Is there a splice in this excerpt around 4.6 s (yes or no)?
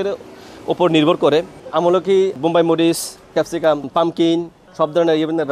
yes